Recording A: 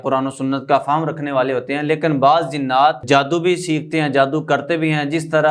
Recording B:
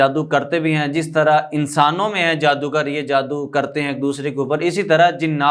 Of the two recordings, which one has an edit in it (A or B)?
A